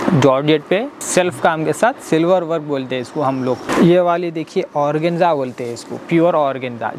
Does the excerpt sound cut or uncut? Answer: cut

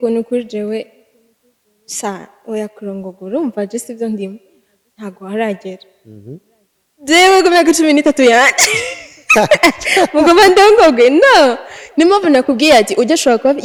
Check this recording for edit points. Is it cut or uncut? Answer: uncut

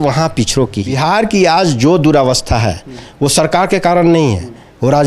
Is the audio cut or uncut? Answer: cut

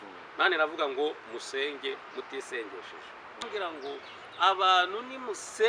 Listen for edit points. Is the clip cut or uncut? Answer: cut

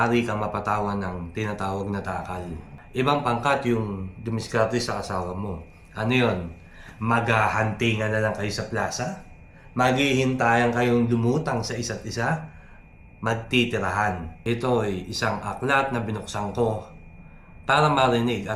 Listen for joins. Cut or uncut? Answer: cut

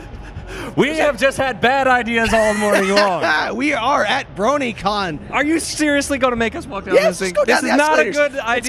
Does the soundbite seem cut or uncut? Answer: uncut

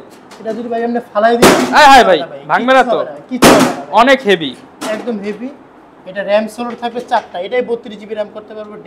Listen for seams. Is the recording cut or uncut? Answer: uncut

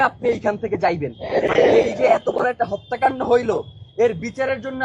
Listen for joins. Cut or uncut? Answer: cut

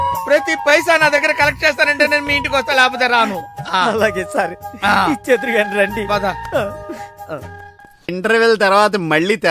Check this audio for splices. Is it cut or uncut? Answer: cut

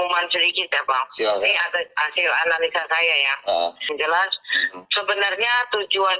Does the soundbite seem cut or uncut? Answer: cut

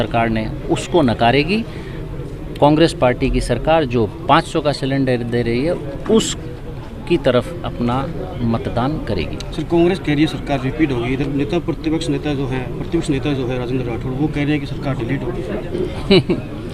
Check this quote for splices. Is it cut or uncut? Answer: uncut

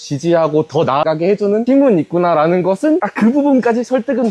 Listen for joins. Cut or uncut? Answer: cut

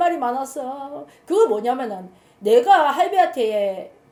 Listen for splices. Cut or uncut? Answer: uncut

